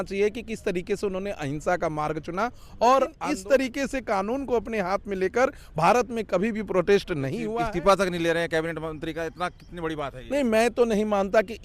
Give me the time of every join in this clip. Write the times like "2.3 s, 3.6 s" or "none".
3.2 s, 7.4 s

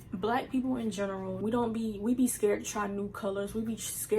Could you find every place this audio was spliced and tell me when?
1.3 s

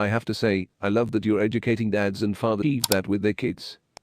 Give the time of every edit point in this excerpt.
3.1 s

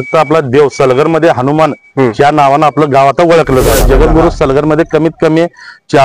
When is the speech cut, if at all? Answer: 3.8 s

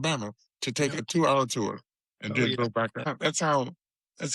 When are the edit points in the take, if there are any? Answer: 3.1 s

